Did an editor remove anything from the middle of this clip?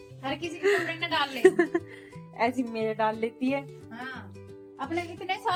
no; 0 cuts

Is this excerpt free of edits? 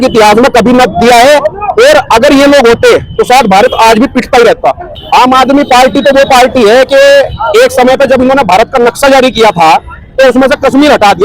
no; 1 cut; at 4.9 s

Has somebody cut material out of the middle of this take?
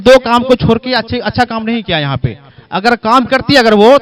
no; 0 cuts

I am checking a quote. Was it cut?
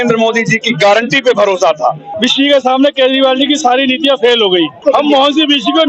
yes; 2 cuts; at 2.1 s, 4.8 s

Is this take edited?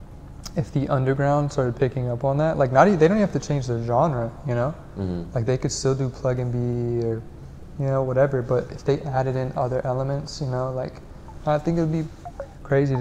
no; 0 cuts

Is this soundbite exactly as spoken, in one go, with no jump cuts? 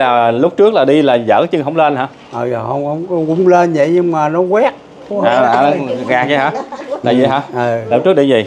yes; 0 cuts

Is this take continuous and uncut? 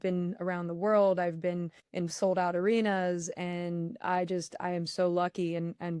yes; 0 cuts

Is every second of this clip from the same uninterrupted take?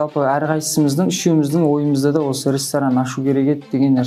yes; 0 cuts

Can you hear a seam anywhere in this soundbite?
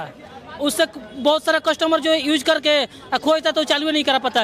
no; 0 cuts

